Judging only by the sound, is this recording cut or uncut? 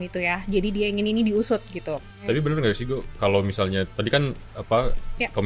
cut